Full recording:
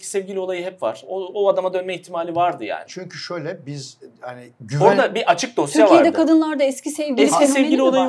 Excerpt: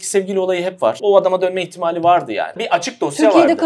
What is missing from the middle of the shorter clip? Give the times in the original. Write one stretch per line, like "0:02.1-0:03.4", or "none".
0:01.0-0:01.3
0:02.9-0:05.2